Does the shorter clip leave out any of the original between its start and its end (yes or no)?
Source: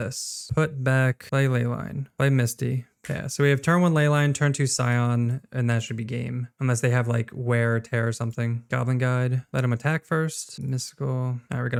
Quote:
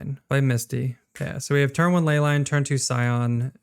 no